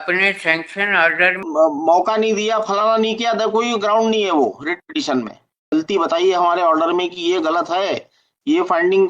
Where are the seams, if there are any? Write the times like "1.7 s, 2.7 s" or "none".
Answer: 1.5 s, 5.7 s